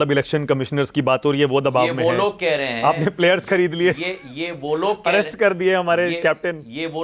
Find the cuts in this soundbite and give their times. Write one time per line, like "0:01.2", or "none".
none